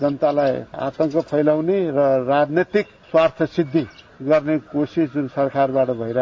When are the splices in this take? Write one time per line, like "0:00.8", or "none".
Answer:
0:03.0